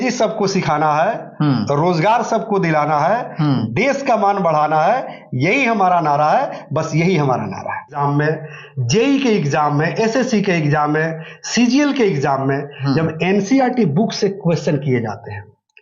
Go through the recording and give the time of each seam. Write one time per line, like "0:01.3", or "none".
0:08.0

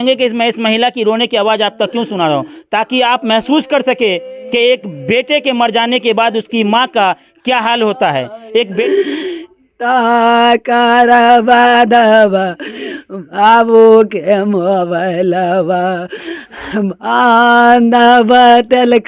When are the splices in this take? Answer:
0:04.2
0:08.3

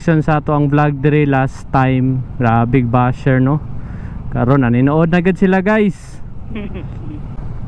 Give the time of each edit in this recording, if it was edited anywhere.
none

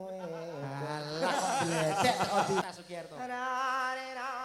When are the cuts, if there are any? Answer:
0:02.6

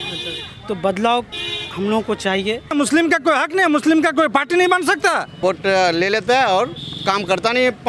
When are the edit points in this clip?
0:02.7
0:05.4

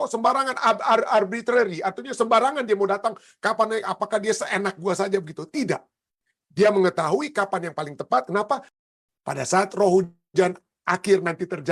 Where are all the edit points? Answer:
0:08.7

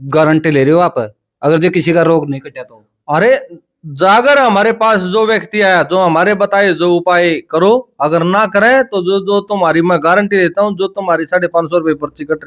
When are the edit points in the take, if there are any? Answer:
none

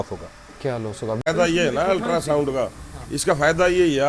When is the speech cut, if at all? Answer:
0:01.3

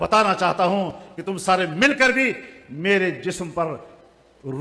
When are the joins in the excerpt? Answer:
none

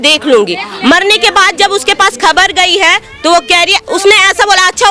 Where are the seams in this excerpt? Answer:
0:03.8

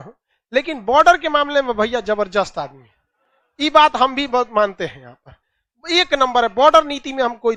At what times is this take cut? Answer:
none

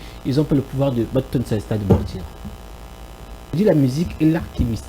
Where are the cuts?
0:03.6

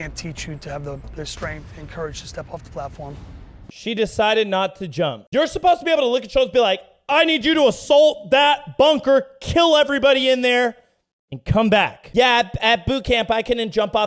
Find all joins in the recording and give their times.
0:03.8
0:12.0

